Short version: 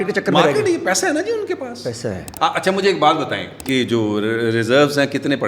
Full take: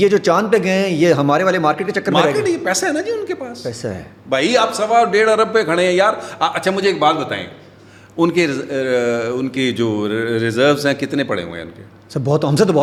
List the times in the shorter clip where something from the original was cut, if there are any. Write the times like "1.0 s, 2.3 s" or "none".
2.3 s, 3.6 s